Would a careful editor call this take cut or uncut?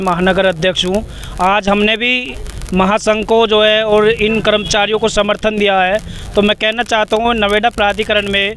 uncut